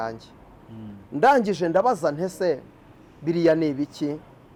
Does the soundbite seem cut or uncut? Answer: uncut